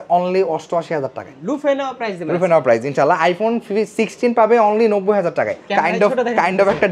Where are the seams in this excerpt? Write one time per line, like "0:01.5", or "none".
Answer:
0:01.3
0:05.6